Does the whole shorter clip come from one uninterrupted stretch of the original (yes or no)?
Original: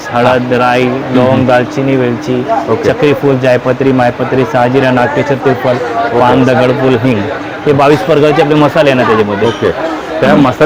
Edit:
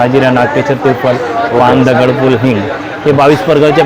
yes